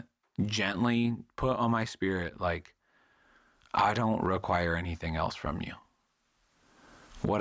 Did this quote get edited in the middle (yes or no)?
no